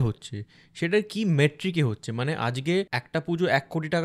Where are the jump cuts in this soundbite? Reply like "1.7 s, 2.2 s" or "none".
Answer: 3.0 s